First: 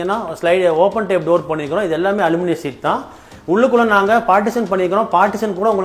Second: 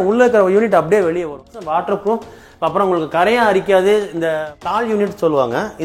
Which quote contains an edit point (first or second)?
second